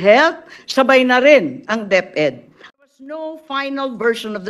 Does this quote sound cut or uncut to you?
cut